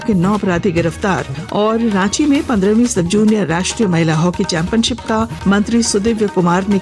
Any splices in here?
yes; 2 cuts; at 1.3 s, 5.3 s

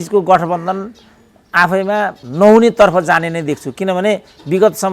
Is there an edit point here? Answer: yes; 1 cut; at 2.2 s

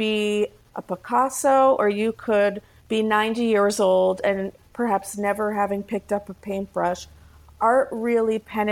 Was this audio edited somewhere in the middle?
no; 0 cuts

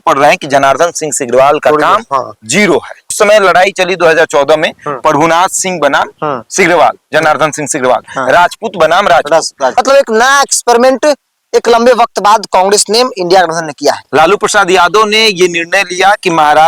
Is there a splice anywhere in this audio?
yes; 3 cuts; at 3.1 s, 9.7 s, 14.0 s

